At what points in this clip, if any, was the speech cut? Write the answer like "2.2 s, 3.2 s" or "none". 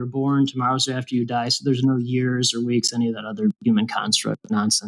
none